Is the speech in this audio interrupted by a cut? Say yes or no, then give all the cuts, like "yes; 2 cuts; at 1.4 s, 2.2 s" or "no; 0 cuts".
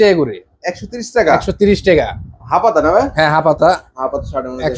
no; 0 cuts